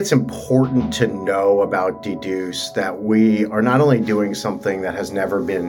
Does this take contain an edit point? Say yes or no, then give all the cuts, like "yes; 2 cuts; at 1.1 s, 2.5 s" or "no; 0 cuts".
no; 0 cuts